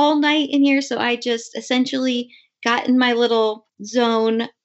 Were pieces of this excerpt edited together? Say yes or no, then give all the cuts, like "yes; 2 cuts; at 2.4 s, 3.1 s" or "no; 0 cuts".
yes; 1 cut; at 3.7 s